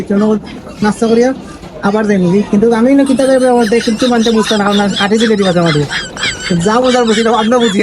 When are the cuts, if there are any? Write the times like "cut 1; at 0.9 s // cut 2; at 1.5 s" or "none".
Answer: none